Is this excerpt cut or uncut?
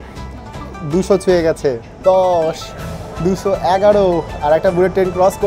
cut